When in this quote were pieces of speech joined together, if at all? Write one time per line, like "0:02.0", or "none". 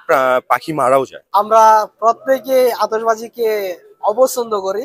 0:01.2